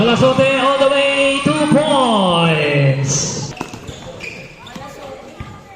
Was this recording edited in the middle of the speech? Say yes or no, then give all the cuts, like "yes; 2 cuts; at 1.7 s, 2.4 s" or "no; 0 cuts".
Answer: yes; 1 cut; at 3.5 s